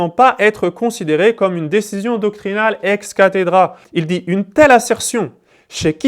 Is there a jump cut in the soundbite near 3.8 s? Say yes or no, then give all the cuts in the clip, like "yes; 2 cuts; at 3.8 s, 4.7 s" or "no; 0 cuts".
yes; 1 cut; at 3.8 s